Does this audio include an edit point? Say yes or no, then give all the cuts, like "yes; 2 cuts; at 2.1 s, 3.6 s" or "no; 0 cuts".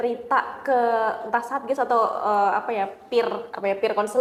no; 0 cuts